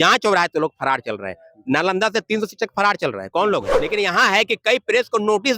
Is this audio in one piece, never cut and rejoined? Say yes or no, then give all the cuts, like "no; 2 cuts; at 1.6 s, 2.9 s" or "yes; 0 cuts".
no; 1 cut; at 3.8 s